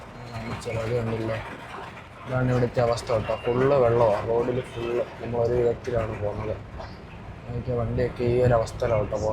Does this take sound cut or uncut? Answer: uncut